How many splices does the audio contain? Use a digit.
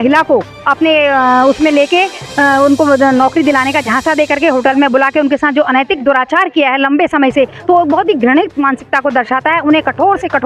0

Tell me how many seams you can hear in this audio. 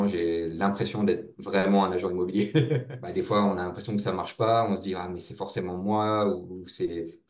1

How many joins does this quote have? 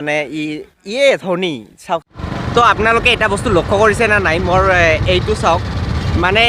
1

